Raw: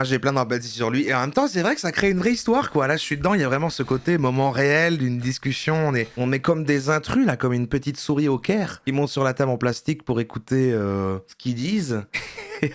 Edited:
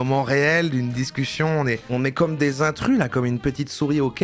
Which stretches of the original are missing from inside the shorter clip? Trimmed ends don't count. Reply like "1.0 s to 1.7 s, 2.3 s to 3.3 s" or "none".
none